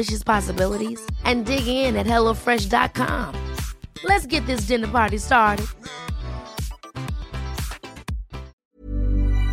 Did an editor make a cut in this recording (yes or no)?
yes